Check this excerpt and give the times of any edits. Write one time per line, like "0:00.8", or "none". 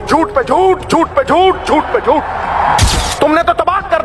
0:02.8